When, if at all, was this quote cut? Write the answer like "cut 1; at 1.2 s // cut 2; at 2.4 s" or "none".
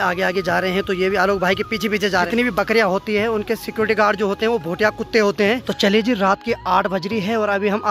cut 1; at 2.3 s // cut 2; at 5.7 s